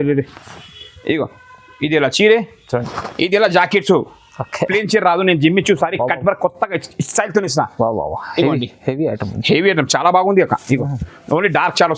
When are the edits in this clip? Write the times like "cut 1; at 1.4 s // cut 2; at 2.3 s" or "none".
cut 1; at 4.7 s

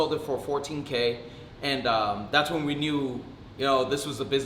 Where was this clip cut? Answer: none

